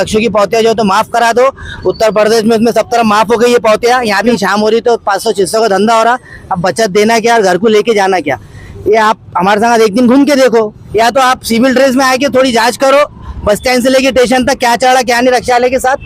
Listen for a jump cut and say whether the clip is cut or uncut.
cut